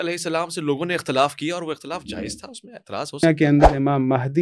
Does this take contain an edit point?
yes; 1 cut; at 3.2 s

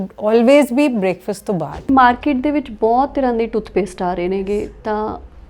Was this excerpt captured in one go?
no; 1 cut; at 1.9 s

